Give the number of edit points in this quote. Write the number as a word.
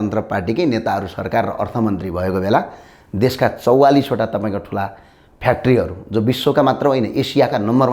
zero